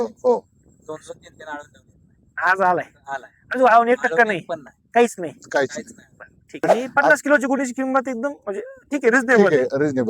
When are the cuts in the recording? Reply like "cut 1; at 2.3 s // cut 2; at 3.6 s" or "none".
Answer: cut 1; at 6.7 s